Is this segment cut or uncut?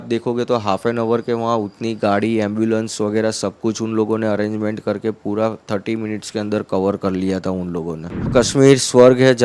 cut